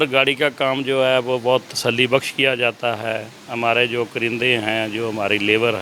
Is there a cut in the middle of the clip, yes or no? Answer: no